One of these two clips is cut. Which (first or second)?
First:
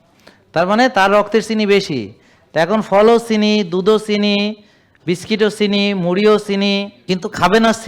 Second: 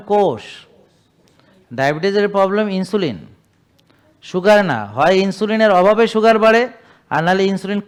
first